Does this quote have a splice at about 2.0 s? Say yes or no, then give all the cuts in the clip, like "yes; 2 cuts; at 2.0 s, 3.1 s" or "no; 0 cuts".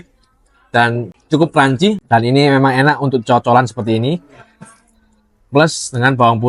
yes; 2 cuts; at 1.0 s, 2.0 s